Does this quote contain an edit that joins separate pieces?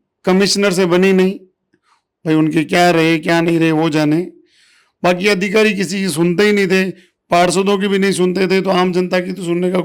no; 0 cuts

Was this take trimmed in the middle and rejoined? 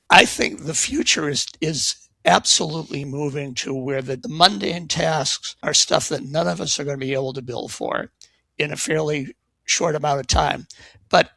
yes; 2 cuts; at 4.3 s, 5.7 s

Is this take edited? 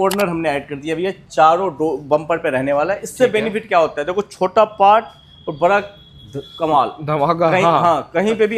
no; 0 cuts

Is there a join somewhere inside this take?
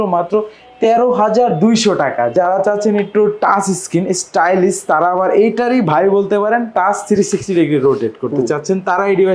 yes; 1 cut; at 2.3 s

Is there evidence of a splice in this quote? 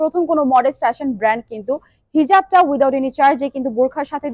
no; 0 cuts

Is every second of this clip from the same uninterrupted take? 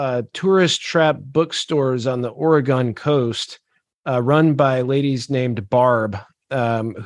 yes; 0 cuts

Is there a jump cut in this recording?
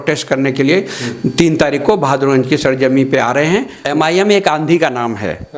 yes; 1 cut; at 3.8 s

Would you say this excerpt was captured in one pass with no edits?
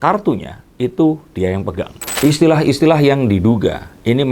no; 1 cut; at 2.1 s

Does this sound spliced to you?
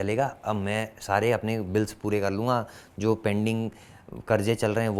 no; 0 cuts

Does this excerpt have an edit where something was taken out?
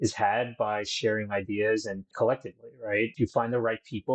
yes; 1 cut; at 3.1 s

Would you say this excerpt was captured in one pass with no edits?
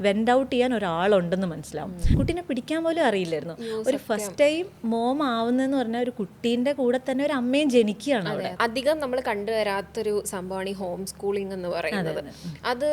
no; 2 cuts; at 2.0 s, 8.6 s

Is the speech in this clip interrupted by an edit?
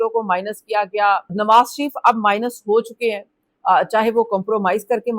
yes; 1 cut; at 1.3 s

